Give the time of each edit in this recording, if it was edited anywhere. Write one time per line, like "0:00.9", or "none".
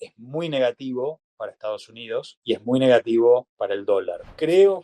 0:02.4
0:03.9